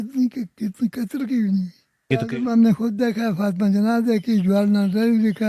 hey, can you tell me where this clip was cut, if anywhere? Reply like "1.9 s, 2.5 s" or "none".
2.1 s